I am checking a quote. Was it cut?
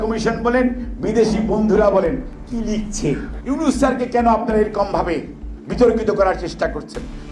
yes; 1 cut; at 3.3 s

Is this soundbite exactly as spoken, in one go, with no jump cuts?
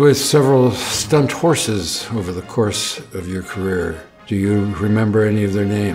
yes; 0 cuts

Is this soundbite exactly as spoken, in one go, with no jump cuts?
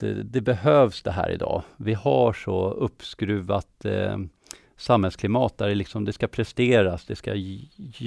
yes; 0 cuts

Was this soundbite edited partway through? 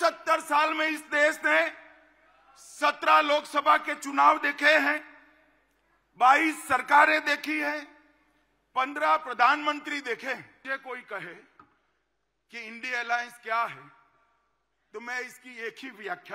yes; 1 cut; at 10.5 s

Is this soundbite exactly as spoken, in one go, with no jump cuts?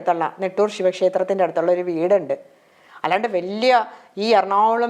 yes; 0 cuts

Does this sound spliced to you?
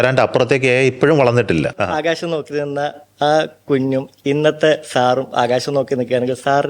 yes; 1 cut; at 1.8 s

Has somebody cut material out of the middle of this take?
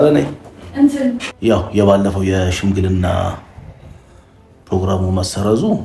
yes; 1 cut; at 1.3 s

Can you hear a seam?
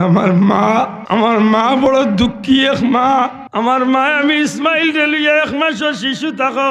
yes; 2 cuts; at 1.0 s, 3.4 s

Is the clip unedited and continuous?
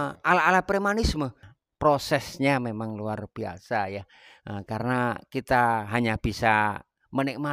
no; 1 cut; at 1.4 s

